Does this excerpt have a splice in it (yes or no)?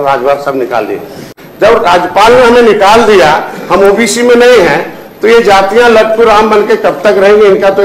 yes